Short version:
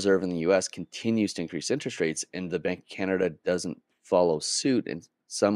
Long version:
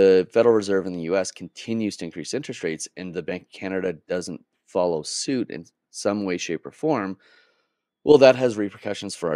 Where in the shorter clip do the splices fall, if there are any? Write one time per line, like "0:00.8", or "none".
none